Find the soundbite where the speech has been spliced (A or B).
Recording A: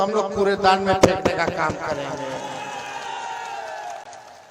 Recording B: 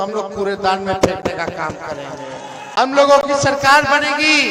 B